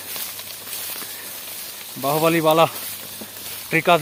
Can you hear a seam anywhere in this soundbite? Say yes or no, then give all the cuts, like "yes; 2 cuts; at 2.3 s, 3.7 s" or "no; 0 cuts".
no; 0 cuts